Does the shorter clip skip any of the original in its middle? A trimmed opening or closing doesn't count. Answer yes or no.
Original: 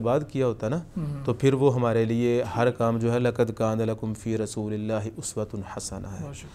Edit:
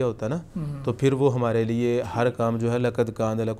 no